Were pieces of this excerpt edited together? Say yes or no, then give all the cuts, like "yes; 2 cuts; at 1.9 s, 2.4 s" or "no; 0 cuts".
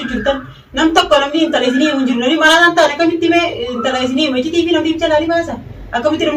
no; 0 cuts